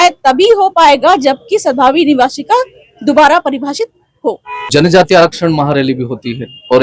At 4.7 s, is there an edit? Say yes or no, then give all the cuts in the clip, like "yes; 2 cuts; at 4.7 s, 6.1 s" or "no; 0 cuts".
yes; 1 cut; at 4.7 s